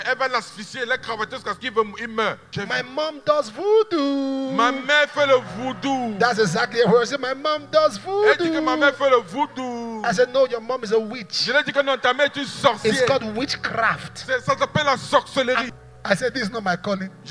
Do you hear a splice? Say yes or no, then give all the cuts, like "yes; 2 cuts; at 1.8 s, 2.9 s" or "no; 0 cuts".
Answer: yes; 2 cuts; at 2.5 s, 15.7 s